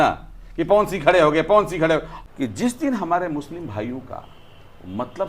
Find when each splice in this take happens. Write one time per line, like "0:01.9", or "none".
0:02.1